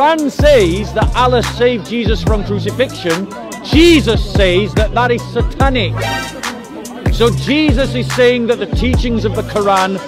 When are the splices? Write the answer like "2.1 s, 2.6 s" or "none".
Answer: none